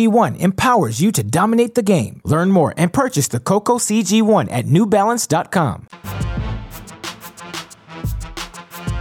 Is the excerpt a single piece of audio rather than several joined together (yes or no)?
yes